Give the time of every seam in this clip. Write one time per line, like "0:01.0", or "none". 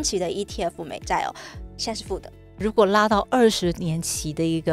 0:02.6